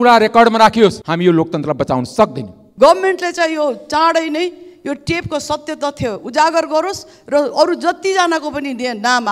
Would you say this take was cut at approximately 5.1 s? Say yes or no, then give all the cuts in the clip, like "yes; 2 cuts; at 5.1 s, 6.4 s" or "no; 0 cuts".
no; 2 cuts; at 1.0 s, 2.6 s